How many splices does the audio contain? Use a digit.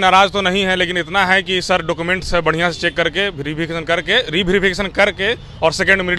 0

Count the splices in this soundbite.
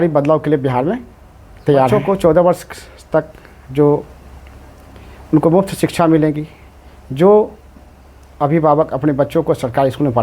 1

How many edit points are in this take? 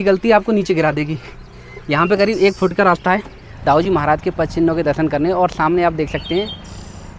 1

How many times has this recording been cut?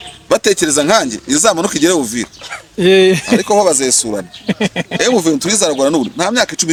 0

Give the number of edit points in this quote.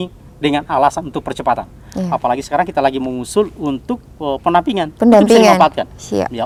0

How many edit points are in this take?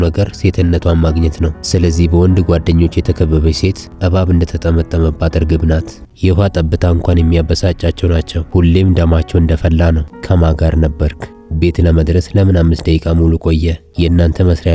2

